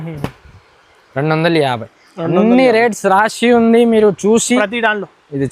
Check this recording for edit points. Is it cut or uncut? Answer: cut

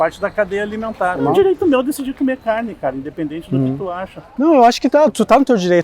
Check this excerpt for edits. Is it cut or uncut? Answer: cut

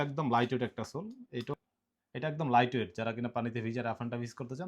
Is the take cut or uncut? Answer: cut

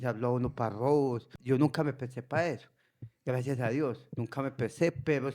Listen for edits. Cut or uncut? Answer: cut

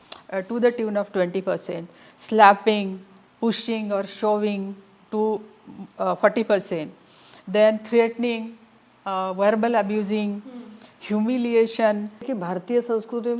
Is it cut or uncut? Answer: cut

